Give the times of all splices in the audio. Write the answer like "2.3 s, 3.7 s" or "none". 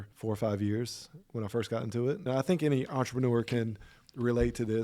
2.2 s